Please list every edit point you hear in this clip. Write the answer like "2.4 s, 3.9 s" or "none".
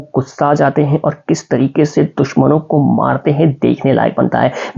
none